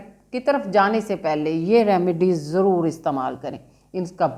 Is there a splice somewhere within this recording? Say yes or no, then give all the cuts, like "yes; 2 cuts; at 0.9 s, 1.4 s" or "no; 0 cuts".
no; 0 cuts